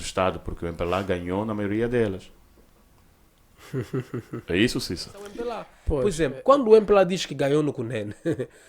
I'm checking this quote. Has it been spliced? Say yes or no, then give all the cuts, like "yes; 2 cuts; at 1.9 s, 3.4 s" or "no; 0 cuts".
yes; 1 cut; at 5.8 s